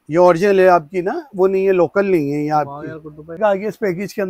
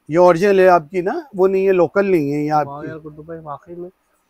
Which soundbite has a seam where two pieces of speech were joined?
first; 1 cut; at 3.3 s

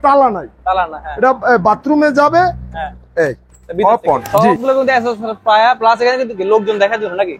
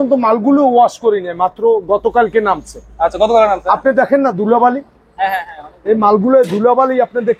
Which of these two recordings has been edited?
first; 1 cut; at 4.2 s

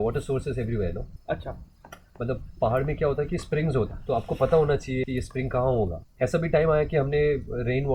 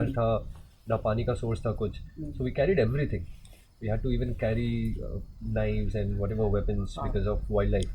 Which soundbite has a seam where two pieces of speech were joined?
first; 4 cuts; at 1.1 s, 4.0 s, 5.0 s, 6.0 s

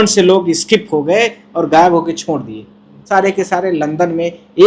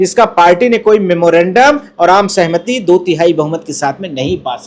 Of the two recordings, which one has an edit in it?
first; 1 cut; at 2.9 s

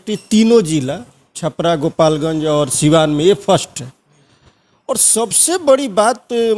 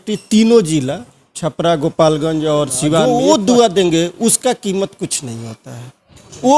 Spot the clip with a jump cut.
second; 1 cut; at 3.0 s

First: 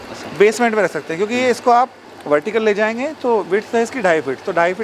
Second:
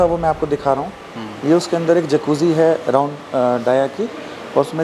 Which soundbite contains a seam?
first; 1 cut; at 2.1 s

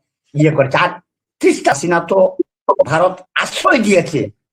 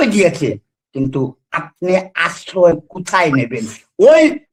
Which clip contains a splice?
first; 1 cut; at 1.8 s

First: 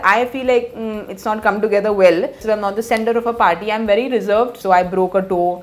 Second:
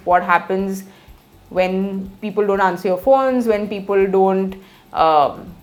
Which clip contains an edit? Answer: first; 2 cuts; at 2.4 s, 4.5 s

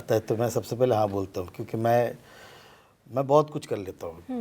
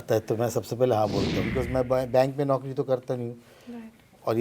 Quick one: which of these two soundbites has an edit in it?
second; 1 cut; at 1.5 s

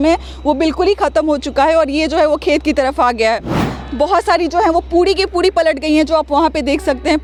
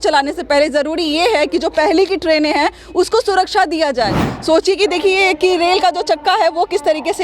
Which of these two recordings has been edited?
second; 1 cut; at 4.2 s

